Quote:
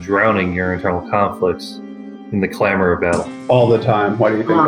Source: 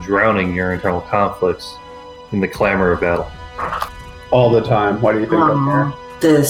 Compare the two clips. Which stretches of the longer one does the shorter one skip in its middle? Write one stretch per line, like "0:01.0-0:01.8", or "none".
0:03.3-0:04.2